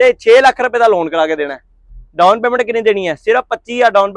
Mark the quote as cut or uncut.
uncut